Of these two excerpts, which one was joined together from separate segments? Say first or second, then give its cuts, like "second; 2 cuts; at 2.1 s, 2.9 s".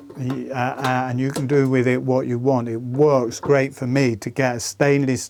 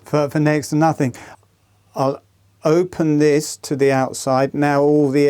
second; 1 cut; at 1.2 s